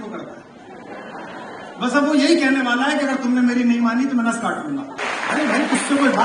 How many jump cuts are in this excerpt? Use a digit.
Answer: 1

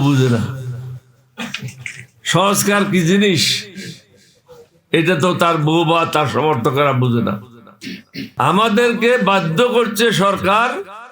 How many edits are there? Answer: 1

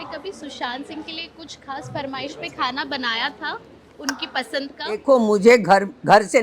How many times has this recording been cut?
1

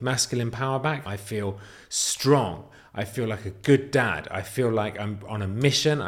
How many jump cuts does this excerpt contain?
1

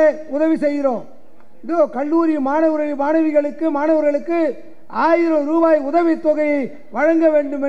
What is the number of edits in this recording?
0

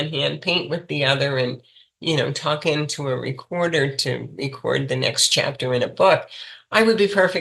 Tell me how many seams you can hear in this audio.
0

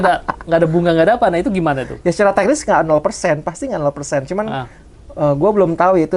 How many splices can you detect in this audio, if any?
0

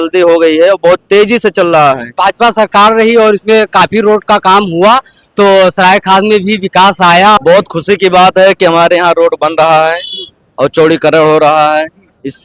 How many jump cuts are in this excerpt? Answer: 2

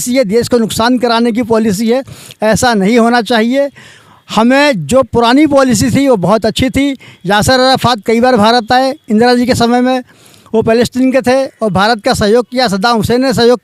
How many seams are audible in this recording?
0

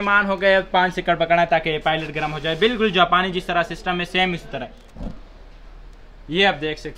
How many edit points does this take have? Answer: 1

